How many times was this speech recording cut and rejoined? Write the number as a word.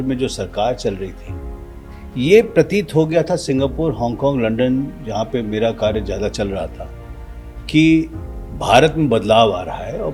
zero